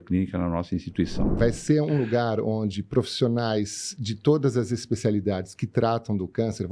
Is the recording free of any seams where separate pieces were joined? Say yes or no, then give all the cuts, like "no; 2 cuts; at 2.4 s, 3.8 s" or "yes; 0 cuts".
no; 1 cut; at 1.3 s